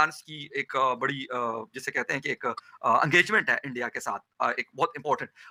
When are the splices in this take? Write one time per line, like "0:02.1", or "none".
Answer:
none